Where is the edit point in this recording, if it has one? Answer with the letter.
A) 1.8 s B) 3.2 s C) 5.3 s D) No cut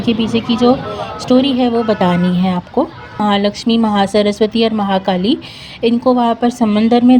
B